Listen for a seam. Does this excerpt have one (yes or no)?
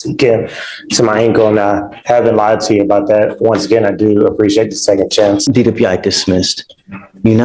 yes